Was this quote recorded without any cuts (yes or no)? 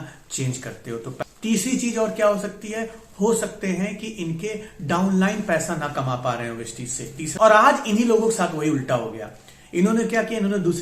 no